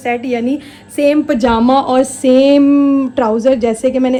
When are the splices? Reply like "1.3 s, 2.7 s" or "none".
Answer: none